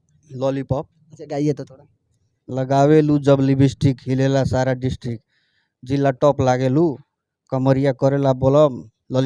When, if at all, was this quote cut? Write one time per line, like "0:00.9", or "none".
none